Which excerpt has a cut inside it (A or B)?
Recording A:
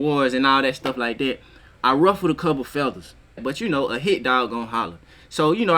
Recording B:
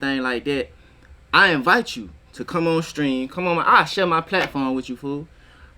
A